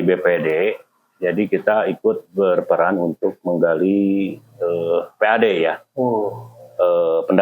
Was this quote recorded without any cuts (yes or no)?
yes